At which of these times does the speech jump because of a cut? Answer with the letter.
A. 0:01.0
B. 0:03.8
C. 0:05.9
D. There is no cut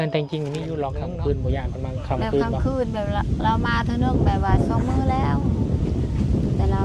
A